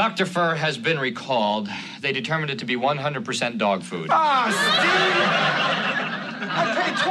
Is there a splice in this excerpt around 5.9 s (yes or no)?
yes